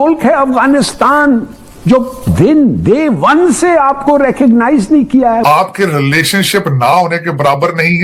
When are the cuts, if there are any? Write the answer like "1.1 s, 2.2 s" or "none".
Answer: 5.4 s